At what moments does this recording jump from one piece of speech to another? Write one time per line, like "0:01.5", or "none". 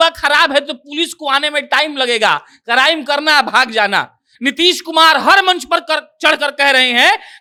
none